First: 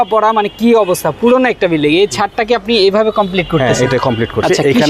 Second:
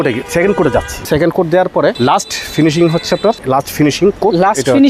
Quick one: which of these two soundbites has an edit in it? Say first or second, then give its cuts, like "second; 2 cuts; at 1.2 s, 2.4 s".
second; 3 cuts; at 1.1 s, 2.0 s, 3.4 s